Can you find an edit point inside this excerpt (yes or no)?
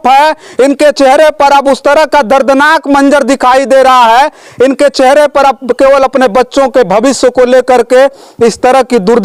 no